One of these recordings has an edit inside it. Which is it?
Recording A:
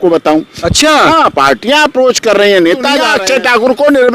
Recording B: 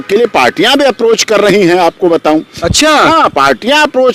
A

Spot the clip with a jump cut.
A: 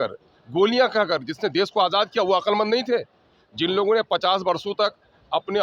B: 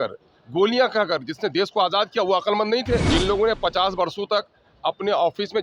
B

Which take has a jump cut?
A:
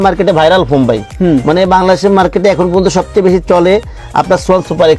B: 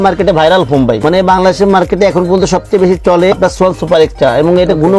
B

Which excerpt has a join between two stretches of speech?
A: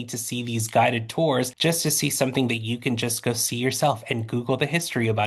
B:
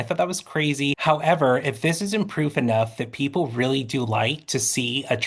B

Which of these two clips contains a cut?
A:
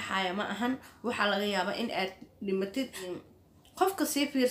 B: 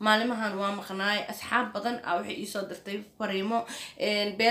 A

